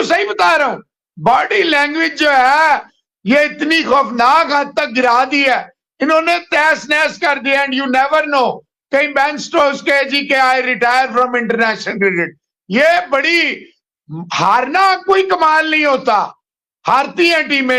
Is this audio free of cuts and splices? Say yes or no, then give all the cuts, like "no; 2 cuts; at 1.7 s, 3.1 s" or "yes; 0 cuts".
yes; 0 cuts